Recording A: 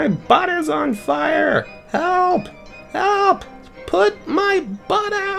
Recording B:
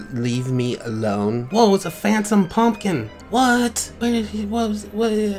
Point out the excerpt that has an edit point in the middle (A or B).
B